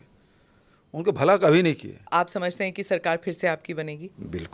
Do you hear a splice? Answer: yes; 1 cut; at 2.1 s

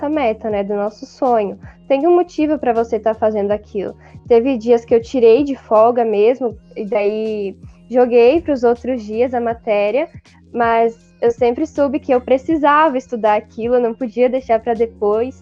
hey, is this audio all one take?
yes; 0 cuts

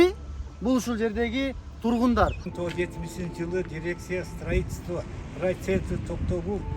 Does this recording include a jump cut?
yes; 1 cut; at 2.5 s

